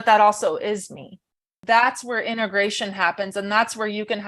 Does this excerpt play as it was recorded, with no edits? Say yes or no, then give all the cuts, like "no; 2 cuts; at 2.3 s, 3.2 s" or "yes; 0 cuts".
no; 1 cut; at 1.5 s